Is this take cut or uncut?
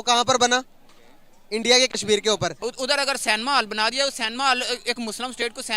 cut